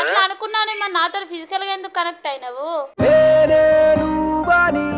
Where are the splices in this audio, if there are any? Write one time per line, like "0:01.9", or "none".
none